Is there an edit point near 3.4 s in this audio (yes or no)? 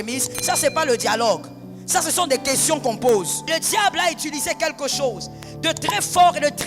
yes